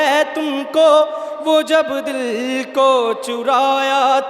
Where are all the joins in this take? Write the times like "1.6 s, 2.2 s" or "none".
none